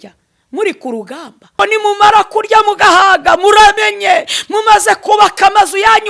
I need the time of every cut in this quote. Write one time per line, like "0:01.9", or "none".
0:01.6